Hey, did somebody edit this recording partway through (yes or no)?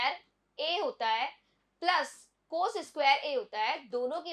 no